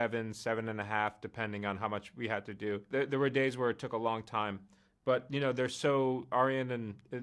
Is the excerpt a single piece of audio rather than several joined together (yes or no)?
no